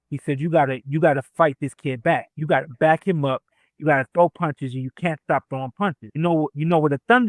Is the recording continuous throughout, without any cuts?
no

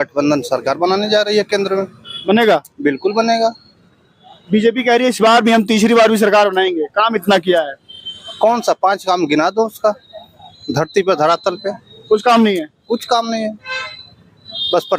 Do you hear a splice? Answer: no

